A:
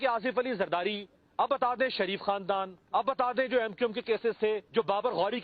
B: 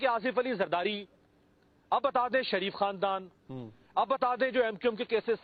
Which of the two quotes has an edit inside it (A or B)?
A